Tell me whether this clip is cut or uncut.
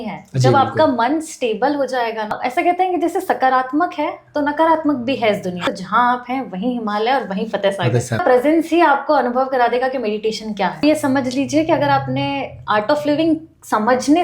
cut